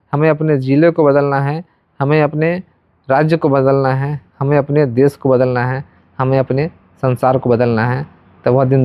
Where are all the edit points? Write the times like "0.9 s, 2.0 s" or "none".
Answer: none